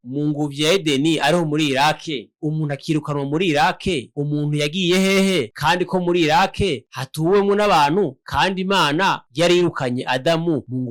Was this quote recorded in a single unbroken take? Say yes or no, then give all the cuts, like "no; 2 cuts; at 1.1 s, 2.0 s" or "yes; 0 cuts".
yes; 0 cuts